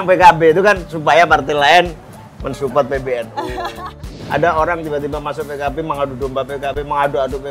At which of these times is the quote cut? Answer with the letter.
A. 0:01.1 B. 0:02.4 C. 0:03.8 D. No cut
C